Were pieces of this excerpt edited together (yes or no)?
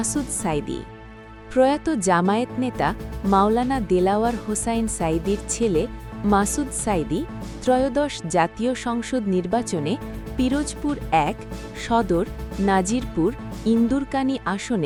no